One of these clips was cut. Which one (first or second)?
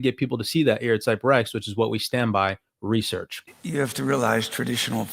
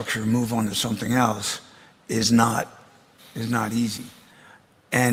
first